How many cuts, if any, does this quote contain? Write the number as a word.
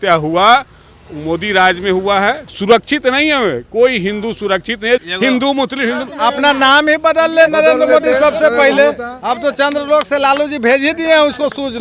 four